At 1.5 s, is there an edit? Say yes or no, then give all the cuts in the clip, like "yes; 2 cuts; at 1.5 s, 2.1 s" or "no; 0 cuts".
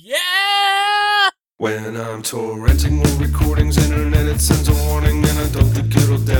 yes; 1 cut; at 1.5 s